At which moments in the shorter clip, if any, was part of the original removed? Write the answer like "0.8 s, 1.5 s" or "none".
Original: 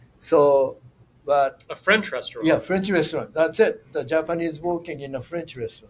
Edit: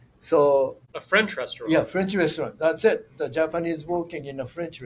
0.9 s